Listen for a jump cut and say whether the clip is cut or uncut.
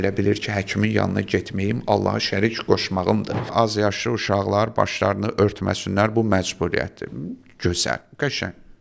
cut